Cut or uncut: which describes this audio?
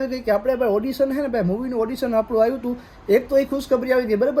uncut